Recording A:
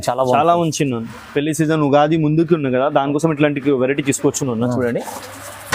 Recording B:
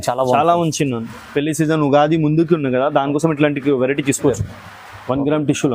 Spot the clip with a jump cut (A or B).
B